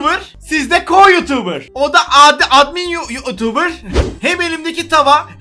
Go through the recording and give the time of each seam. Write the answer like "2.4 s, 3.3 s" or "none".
4.1 s